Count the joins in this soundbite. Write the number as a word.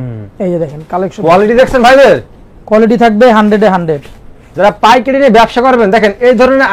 zero